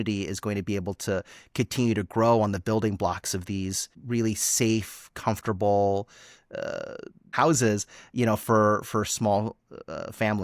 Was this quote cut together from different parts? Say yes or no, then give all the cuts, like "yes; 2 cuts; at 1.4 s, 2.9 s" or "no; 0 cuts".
yes; 2 cuts; at 3.9 s, 7.3 s